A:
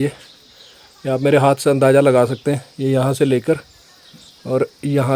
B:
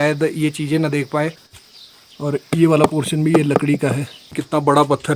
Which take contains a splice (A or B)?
B